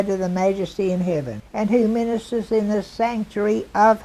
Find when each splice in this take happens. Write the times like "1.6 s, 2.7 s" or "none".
1.4 s